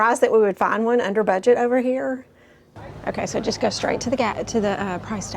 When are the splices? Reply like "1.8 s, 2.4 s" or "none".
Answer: 2.8 s